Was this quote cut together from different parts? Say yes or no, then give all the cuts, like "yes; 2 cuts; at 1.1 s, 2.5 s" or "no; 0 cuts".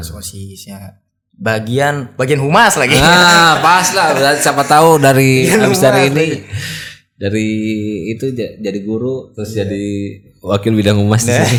no; 0 cuts